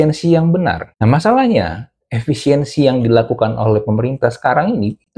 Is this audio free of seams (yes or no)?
yes